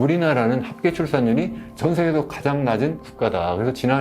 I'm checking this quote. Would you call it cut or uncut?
cut